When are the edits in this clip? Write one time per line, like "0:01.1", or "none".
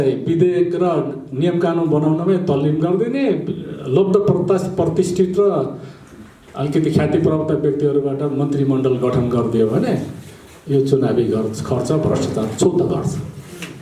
none